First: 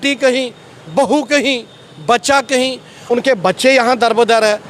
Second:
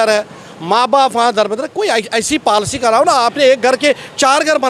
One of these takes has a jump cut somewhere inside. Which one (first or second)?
first